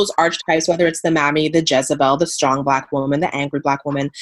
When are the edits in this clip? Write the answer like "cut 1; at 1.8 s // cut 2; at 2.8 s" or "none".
none